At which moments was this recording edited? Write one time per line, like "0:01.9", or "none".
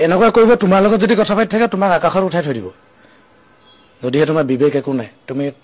none